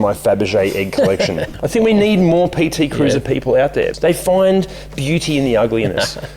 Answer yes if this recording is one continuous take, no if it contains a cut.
no